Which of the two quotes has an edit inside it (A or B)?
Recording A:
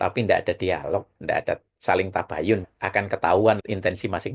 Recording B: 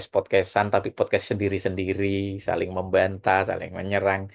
A